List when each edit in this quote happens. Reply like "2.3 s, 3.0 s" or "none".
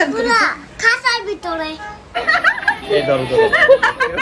2.1 s